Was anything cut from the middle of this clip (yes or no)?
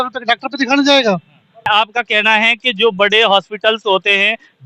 yes